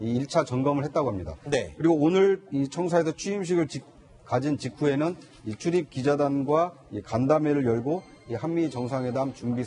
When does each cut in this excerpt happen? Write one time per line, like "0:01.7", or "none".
0:01.4